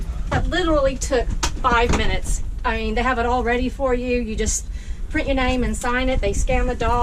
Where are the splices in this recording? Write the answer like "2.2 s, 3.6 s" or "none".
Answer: none